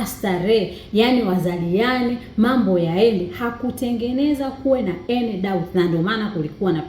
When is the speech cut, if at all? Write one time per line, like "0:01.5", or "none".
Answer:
none